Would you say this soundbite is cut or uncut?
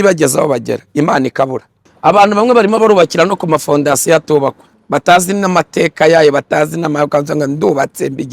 cut